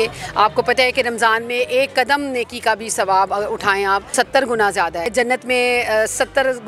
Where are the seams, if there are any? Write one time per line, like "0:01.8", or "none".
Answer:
0:04.1
0:05.1